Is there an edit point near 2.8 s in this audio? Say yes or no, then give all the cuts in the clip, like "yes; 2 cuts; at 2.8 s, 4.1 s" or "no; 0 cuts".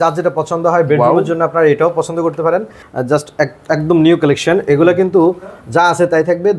yes; 1 cut; at 2.8 s